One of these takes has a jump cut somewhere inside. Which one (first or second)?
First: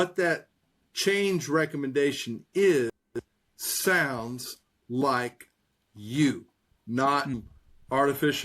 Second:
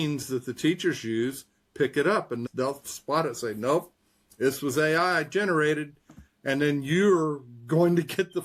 first